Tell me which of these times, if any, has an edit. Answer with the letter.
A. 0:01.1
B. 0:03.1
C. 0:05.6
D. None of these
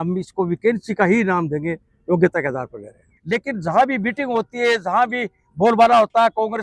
B